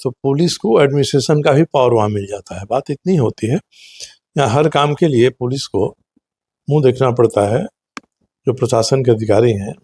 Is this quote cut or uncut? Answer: uncut